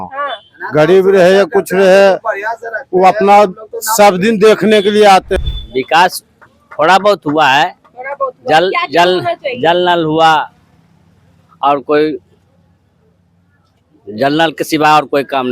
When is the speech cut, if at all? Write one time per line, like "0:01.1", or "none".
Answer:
0:05.3